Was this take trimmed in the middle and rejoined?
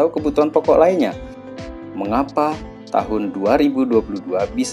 yes; 1 cut; at 1.7 s

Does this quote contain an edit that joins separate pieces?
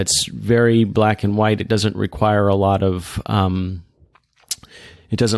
no; 0 cuts

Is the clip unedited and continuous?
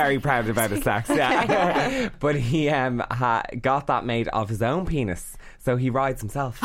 no; 1 cut; at 2.1 s

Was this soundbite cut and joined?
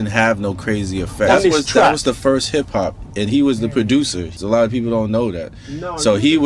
yes; 1 cut; at 1.3 s

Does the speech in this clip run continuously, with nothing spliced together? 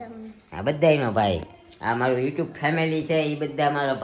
yes; 0 cuts

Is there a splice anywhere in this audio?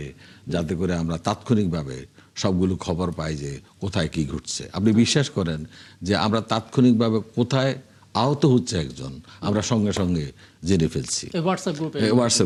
no; 0 cuts

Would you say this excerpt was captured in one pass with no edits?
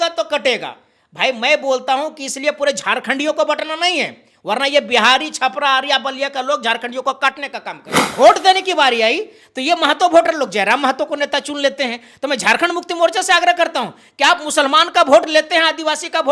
no; 1 cut; at 8.0 s

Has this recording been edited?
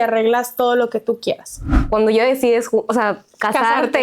yes; 1 cut; at 2.0 s

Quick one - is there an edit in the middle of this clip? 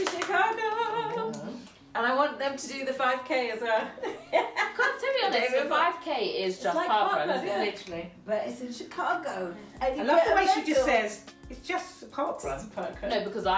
no; 0 cuts

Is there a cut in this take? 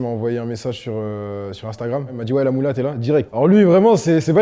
no; 0 cuts

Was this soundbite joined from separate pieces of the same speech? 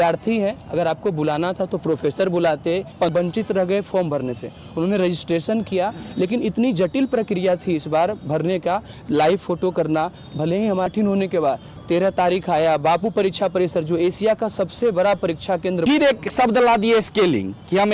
yes; 3 cuts; at 3.1 s, 10.9 s, 15.8 s

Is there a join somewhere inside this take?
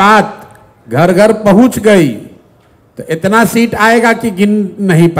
no; 0 cuts

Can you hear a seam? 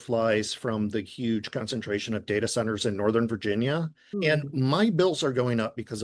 no; 0 cuts

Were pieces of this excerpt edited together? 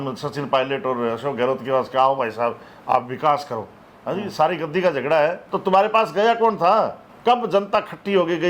yes; 1 cut; at 5.5 s

